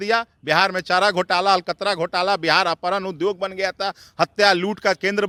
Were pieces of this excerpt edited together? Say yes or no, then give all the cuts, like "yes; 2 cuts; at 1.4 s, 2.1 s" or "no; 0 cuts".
no; 0 cuts